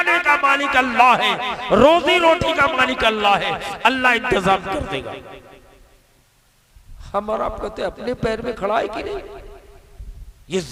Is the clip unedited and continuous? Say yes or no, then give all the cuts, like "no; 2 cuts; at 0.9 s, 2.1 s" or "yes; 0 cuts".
yes; 0 cuts